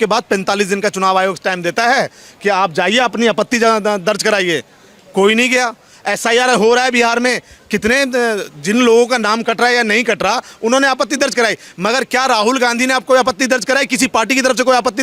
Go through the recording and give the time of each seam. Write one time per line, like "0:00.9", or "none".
none